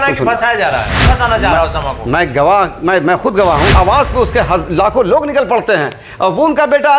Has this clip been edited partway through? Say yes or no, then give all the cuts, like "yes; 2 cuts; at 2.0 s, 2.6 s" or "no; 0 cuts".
yes; 2 cuts; at 1.0 s, 3.7 s